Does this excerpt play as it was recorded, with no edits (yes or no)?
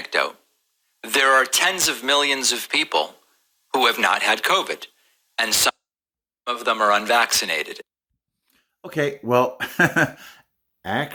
yes